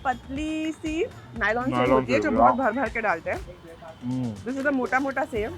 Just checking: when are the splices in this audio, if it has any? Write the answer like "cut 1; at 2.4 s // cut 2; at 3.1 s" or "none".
none